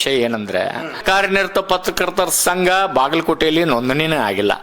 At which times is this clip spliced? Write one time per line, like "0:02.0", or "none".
0:01.0